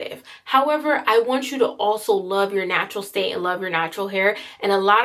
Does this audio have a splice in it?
no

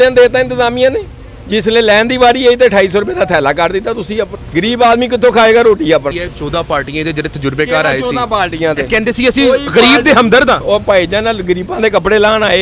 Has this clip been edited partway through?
yes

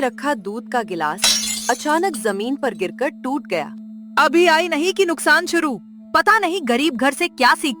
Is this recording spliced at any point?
no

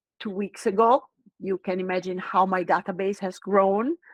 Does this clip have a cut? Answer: no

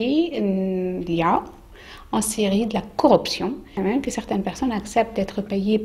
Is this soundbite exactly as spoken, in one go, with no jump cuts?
no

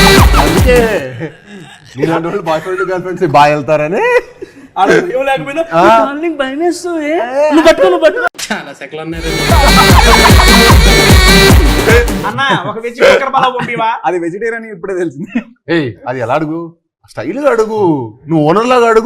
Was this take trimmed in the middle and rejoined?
yes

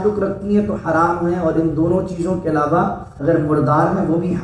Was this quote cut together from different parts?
yes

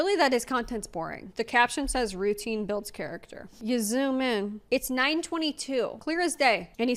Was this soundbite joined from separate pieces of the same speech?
yes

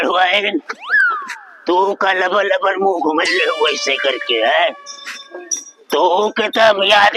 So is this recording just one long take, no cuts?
yes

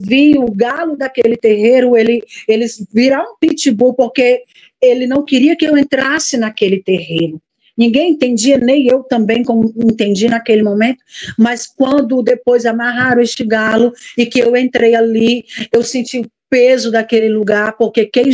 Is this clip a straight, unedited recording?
yes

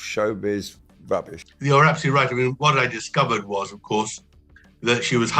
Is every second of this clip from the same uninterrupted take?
no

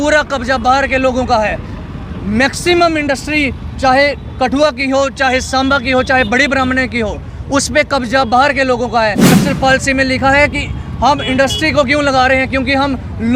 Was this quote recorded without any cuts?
no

